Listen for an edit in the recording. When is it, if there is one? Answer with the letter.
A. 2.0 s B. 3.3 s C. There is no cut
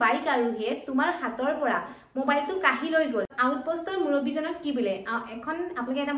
B